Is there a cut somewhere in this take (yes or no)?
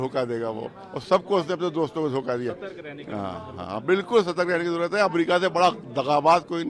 no